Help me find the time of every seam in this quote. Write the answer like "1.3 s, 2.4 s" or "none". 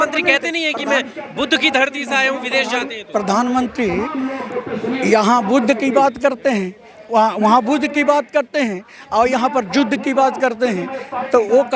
none